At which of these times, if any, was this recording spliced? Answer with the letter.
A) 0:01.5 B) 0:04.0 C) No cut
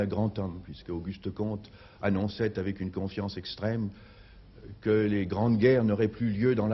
B